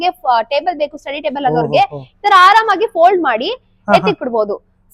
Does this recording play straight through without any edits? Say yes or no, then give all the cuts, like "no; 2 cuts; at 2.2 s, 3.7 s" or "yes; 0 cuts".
yes; 0 cuts